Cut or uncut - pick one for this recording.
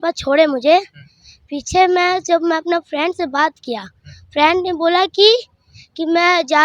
uncut